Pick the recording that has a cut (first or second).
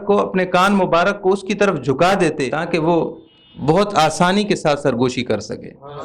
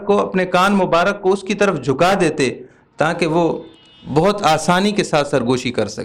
first